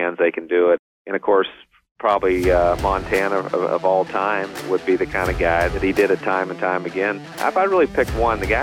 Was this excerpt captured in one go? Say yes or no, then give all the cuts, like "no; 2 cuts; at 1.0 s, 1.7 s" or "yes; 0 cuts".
no; 4 cuts; at 0.8 s, 4.6 s, 5.7 s, 7.4 s